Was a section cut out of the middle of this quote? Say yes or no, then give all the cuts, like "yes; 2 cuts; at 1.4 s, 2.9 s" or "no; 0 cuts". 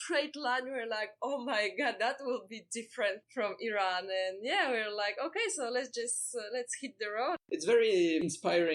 yes; 2 cuts; at 3.2 s, 7.5 s